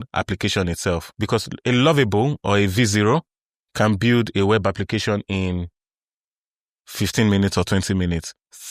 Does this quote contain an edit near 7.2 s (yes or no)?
no